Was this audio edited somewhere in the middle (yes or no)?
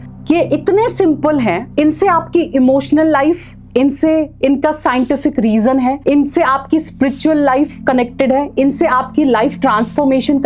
no